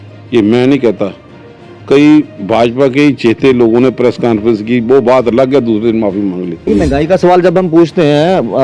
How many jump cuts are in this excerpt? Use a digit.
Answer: 1